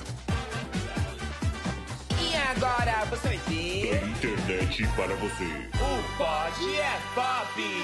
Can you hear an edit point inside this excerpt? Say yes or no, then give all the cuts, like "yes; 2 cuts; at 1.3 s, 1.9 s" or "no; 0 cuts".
no; 0 cuts